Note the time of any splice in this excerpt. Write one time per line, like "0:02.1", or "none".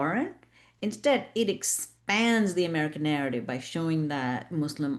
none

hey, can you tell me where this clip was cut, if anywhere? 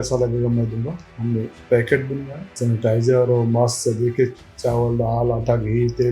0:02.5

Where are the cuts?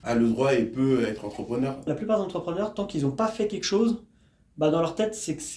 0:01.8

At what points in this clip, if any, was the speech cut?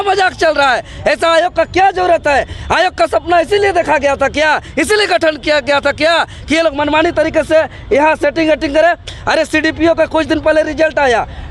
none

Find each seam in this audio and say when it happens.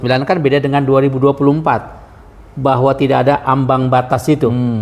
none

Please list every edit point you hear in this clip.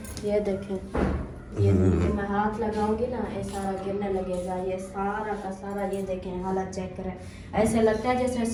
none

